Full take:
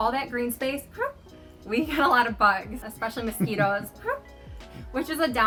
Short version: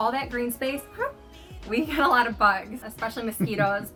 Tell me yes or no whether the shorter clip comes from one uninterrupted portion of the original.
yes